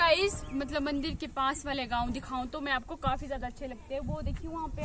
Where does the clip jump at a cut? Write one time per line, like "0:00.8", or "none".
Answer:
none